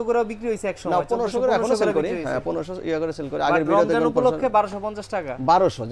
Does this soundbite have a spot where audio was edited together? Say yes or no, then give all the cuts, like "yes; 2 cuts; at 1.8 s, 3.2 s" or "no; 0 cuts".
no; 0 cuts